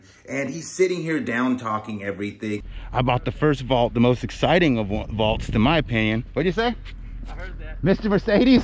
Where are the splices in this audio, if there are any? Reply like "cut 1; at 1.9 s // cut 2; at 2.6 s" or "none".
cut 1; at 2.7 s